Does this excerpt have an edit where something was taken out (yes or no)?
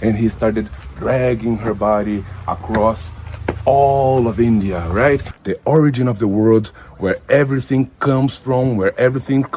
yes